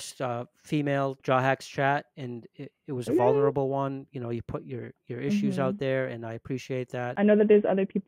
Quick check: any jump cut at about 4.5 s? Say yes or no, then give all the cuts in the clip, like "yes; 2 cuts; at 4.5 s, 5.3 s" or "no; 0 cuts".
no; 2 cuts; at 1.2 s, 7.1 s